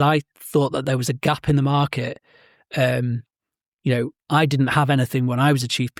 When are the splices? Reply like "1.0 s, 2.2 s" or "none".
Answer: none